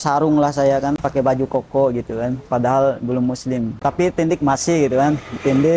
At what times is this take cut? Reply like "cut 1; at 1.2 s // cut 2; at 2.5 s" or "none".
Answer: cut 1; at 1.0 s // cut 2; at 3.8 s